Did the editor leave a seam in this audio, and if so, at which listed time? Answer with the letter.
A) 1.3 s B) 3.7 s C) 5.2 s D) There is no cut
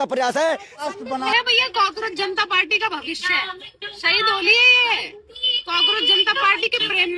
A